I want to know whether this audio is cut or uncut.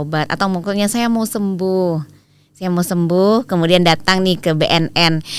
uncut